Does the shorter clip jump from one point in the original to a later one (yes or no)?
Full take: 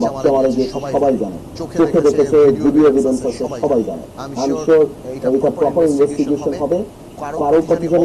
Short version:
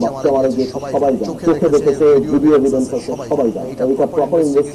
yes